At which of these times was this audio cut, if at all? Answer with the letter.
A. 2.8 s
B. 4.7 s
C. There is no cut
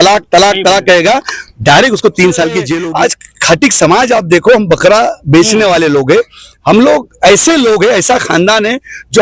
A